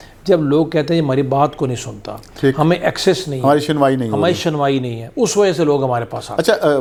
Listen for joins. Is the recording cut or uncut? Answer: uncut